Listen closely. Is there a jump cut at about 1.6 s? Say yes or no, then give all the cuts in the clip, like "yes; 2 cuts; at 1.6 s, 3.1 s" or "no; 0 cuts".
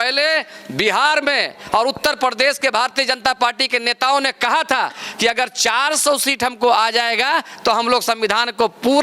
no; 0 cuts